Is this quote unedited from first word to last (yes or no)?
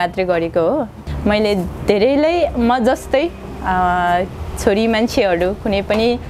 yes